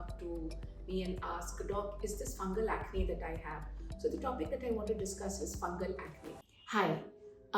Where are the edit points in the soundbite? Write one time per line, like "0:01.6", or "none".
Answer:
0:06.6